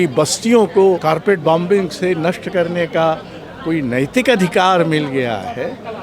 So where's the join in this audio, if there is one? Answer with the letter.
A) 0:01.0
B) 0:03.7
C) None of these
A